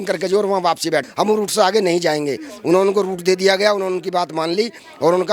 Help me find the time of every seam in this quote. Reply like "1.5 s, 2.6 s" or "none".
1.1 s

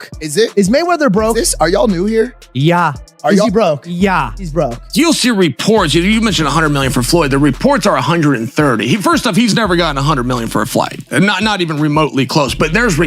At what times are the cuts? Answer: 4.8 s

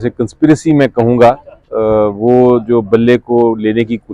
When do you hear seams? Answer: none

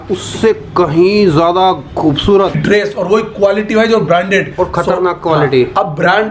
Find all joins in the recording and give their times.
2.6 s

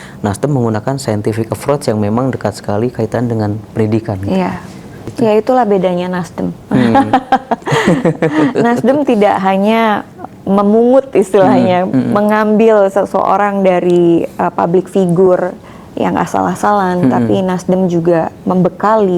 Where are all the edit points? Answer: 5.0 s

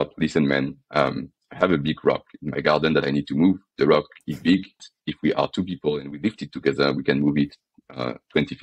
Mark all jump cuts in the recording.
4.9 s

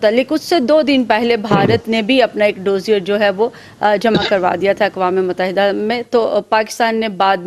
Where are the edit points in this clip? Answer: none

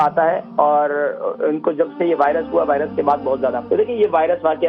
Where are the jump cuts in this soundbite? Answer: 3.6 s

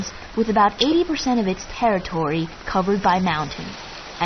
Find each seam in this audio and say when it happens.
1.2 s

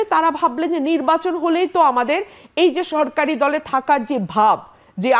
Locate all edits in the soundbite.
none

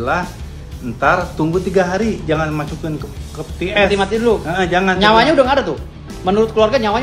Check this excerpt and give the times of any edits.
none

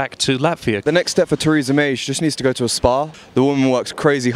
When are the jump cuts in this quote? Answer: 0.8 s, 3.2 s

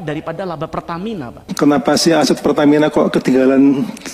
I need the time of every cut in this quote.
1.5 s

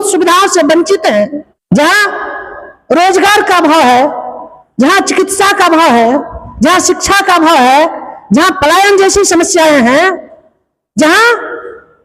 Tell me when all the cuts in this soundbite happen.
1.5 s

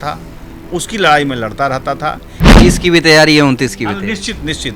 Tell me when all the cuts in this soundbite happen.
2.3 s

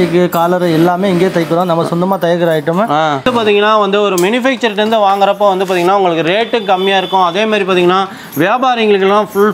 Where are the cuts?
3.2 s

